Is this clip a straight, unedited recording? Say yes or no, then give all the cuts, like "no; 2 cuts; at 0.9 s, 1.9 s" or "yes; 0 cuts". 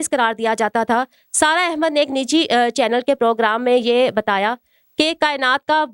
yes; 0 cuts